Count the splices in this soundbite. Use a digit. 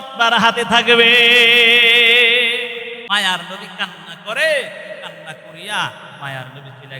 1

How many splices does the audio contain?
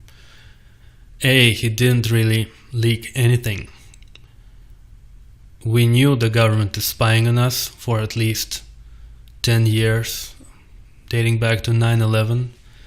1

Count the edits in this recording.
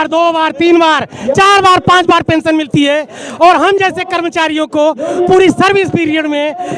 0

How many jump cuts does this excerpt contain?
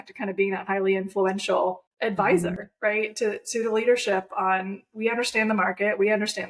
1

